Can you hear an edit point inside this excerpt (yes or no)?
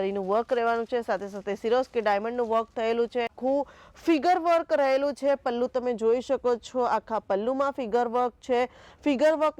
yes